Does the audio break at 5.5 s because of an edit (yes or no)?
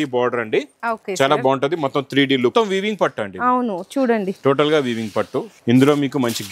yes